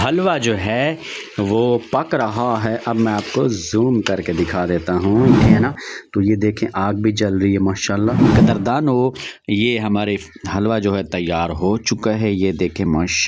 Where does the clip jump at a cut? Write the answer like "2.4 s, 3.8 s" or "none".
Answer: 5.4 s, 8.3 s

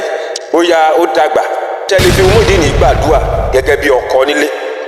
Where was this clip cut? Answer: 1.9 s

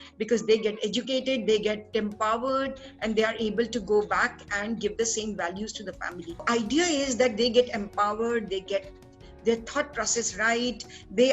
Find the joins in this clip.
6.4 s

